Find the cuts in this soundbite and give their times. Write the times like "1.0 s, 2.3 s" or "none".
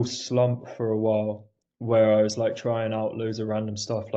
none